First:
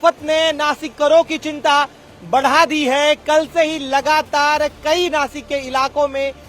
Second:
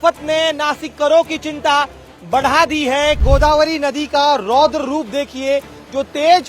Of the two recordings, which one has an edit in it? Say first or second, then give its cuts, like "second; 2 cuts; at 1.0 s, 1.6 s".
second; 1 cut; at 3.2 s